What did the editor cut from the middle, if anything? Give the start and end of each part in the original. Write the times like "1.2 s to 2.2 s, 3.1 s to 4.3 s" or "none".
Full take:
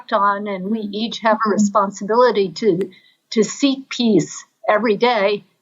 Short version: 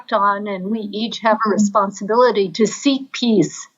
2.5 s to 3.3 s